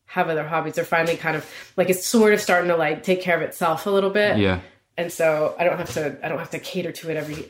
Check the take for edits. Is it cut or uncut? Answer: uncut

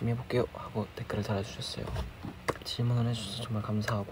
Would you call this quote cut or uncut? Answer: cut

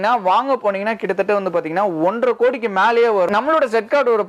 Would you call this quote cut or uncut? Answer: cut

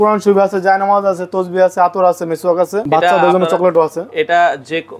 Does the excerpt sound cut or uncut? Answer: cut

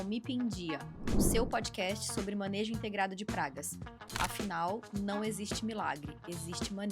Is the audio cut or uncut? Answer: uncut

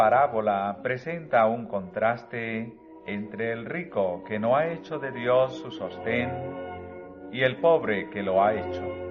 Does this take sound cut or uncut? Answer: uncut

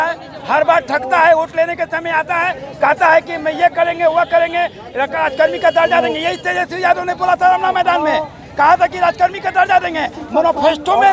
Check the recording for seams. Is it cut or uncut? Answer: uncut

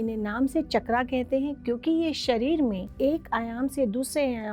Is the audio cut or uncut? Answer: cut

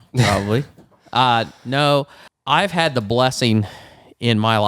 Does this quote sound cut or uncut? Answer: cut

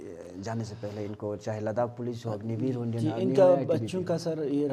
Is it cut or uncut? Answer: uncut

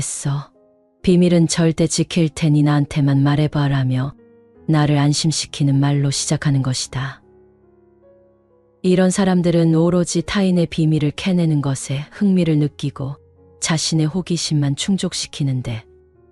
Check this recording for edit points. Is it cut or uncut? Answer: cut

